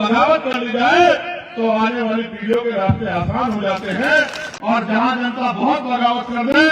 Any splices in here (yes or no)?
yes